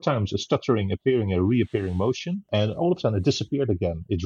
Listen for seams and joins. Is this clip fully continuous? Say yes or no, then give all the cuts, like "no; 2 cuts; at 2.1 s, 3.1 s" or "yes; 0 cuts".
no; 1 cut; at 2.3 s